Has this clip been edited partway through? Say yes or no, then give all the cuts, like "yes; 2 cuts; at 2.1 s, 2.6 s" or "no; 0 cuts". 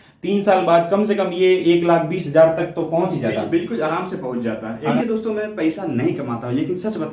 yes; 1 cut; at 4.9 s